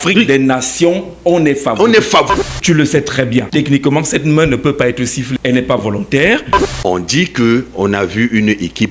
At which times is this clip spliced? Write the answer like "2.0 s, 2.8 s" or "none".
2.3 s, 3.5 s, 5.3 s, 6.6 s